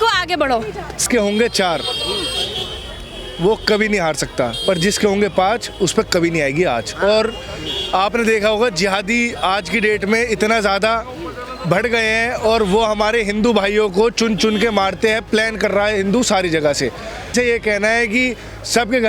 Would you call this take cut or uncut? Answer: cut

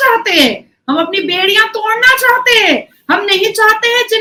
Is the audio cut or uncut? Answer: uncut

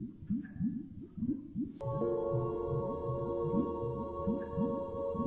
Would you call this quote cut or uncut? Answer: uncut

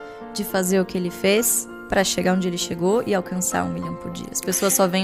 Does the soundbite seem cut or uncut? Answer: uncut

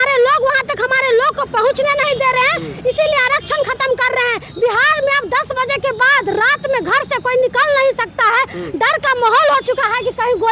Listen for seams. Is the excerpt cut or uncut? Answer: cut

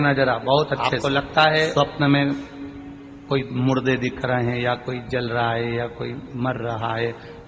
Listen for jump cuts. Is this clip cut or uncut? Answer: cut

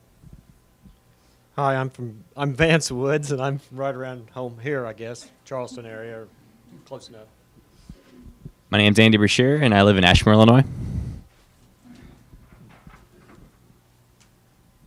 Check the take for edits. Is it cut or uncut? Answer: uncut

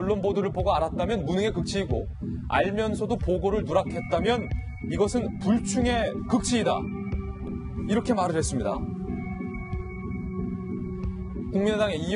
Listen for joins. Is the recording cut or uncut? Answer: cut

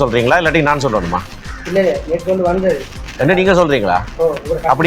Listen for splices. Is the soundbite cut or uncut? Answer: uncut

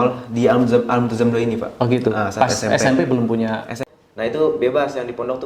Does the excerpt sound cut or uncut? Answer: cut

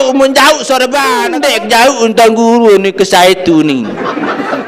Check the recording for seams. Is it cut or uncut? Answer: cut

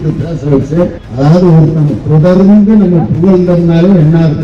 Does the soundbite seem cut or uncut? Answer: cut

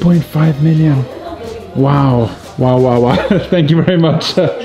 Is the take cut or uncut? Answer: uncut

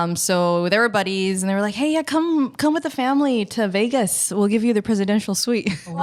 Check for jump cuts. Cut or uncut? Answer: uncut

